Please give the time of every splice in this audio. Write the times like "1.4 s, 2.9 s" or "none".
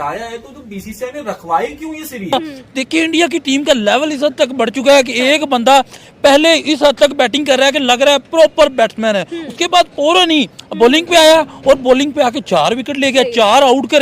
2.3 s